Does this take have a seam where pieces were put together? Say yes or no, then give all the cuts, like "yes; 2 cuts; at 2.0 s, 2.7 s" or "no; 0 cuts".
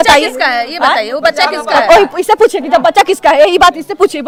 no; 0 cuts